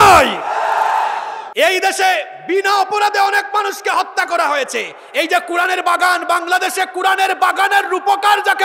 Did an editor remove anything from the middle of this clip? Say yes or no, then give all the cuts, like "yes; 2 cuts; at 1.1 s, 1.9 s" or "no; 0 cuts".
yes; 1 cut; at 1.4 s